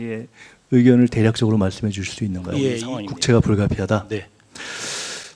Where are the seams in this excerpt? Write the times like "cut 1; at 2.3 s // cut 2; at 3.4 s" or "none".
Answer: cut 1; at 2.8 s